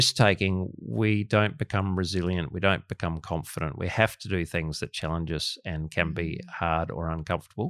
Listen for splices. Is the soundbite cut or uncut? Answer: uncut